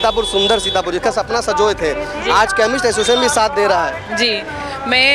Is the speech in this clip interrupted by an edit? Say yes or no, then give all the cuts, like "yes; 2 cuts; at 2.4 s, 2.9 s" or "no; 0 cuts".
no; 0 cuts